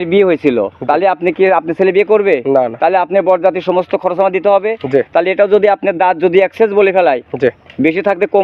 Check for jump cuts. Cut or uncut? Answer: uncut